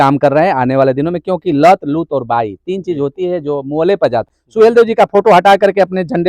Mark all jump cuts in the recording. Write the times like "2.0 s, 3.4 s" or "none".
4.4 s

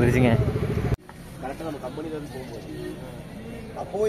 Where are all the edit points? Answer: 1.0 s

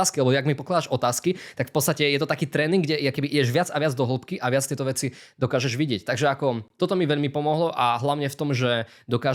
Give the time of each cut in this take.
none

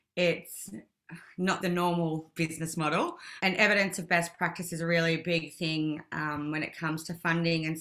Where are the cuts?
1.6 s

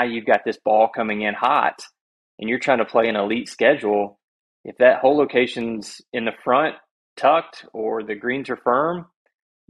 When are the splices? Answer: none

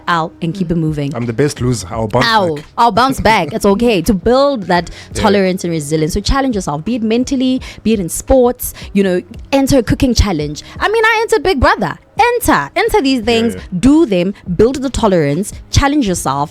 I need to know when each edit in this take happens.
none

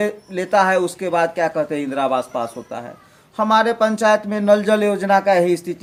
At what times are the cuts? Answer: none

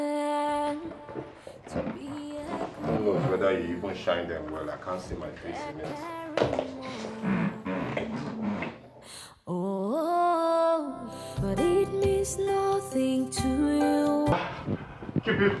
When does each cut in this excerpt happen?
14.3 s

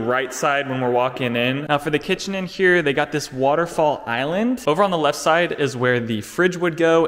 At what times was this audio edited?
1.7 s, 4.6 s

